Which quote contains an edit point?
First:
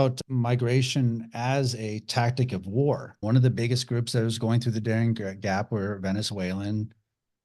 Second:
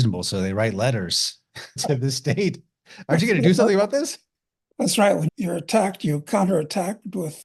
first; 1 cut; at 3.2 s

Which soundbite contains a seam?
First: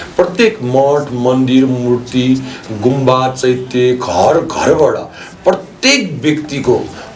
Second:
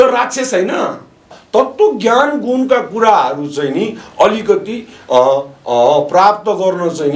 second; 1 cut; at 1.4 s

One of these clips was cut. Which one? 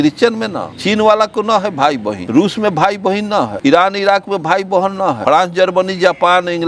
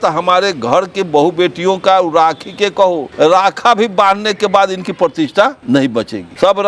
first; 3 cuts; at 2.2 s, 3.5 s, 5.2 s

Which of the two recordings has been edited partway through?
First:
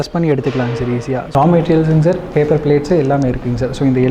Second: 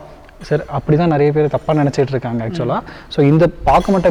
first; 1 cut; at 1.2 s

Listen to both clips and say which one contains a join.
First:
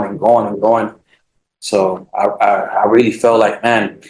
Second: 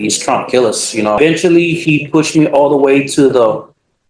second; 1 cut; at 1.2 s

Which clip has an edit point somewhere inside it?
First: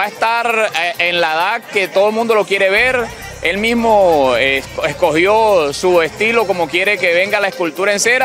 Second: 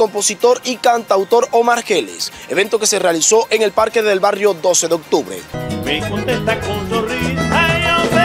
second; 1 cut; at 5.4 s

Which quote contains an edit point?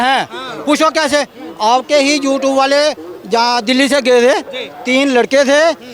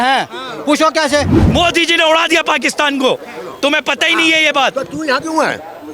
second; 1 cut; at 1.4 s

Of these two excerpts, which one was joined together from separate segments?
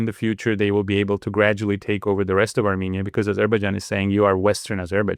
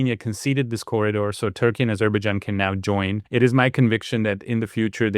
second; 1 cut; at 3.2 s

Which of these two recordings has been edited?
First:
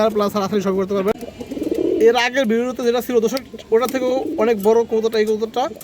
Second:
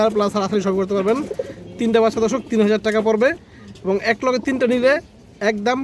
first; 1 cut; at 1.8 s

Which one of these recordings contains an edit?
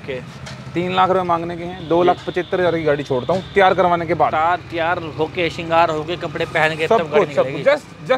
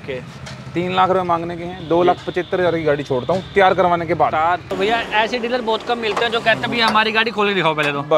second; 1 cut; at 4.7 s

